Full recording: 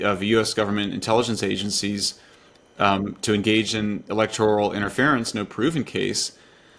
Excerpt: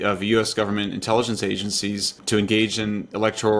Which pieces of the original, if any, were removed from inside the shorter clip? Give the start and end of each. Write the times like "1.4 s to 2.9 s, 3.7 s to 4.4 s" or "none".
2.2 s to 3.2 s